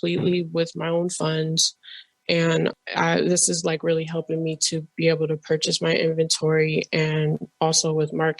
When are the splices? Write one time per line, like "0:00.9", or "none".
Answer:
0:02.7